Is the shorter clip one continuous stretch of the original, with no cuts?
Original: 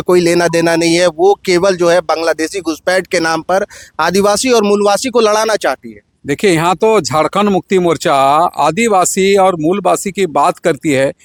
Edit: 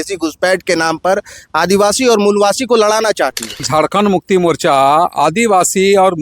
no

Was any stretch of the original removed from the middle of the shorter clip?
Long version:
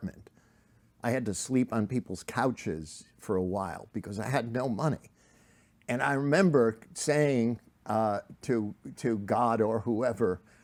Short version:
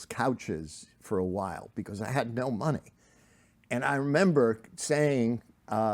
no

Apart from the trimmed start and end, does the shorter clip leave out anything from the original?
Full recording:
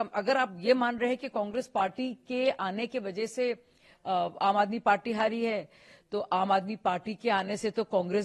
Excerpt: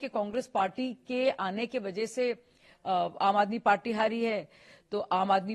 no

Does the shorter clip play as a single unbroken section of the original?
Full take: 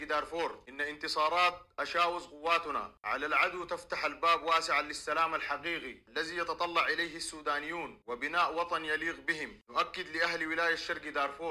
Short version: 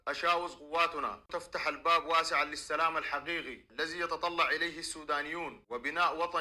no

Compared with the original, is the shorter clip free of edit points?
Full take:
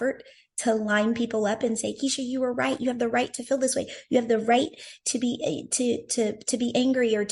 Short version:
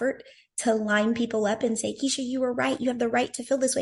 yes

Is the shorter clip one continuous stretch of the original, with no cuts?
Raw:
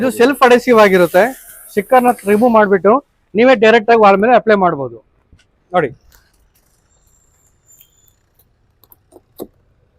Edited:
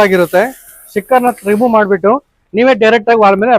yes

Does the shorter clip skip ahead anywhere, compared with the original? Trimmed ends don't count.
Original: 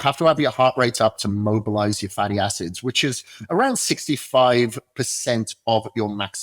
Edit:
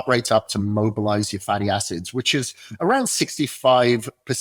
no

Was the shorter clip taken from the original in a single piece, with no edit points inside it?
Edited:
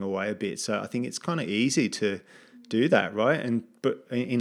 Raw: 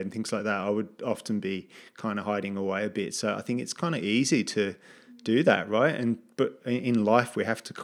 yes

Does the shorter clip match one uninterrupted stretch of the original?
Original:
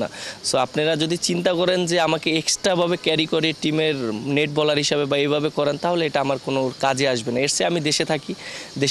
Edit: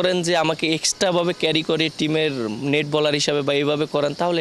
yes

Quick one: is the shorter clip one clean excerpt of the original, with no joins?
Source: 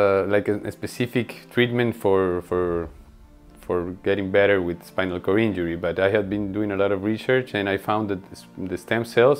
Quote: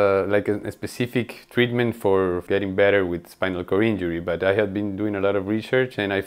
no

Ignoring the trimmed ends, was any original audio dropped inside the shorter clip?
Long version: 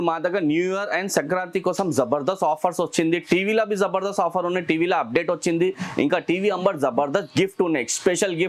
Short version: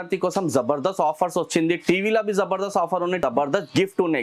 yes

